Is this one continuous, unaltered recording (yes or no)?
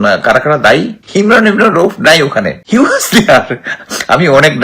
no